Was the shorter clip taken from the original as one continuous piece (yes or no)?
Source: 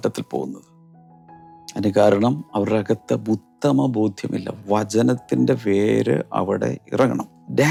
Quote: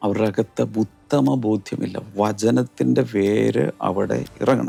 yes